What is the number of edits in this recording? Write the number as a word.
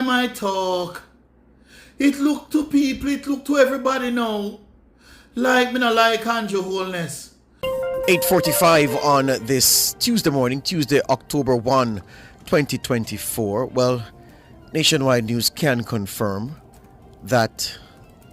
one